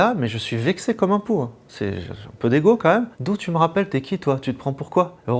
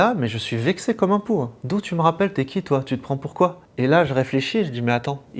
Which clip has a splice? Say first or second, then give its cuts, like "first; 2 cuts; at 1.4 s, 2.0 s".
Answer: second; 2 cuts; at 1.6 s, 3.6 s